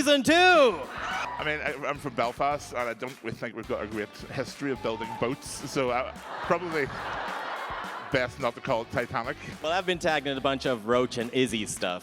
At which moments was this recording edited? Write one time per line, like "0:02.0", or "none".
0:01.1
0:09.5